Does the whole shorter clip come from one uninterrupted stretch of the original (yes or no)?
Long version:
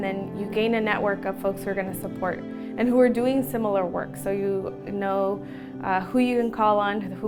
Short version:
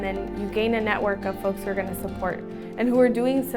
yes